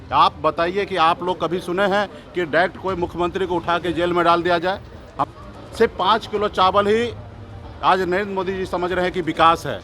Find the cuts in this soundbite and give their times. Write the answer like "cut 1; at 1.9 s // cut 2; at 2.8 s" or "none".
cut 1; at 5.3 s